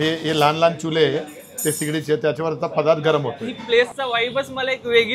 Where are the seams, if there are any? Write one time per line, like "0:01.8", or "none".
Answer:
0:03.5